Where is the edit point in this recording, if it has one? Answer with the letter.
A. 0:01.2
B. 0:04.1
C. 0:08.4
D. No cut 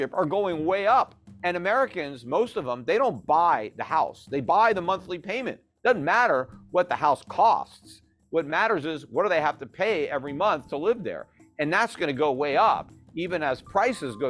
A